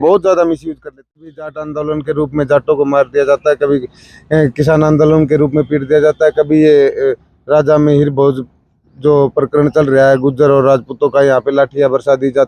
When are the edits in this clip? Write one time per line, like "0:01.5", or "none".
0:01.0